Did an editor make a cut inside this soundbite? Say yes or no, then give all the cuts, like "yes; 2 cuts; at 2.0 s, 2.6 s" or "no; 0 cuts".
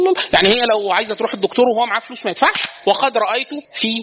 yes; 1 cut; at 2.7 s